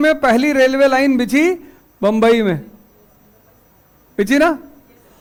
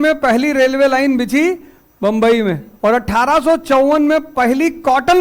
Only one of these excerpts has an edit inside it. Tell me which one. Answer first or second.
second